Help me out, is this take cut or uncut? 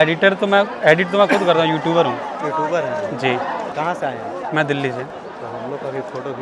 cut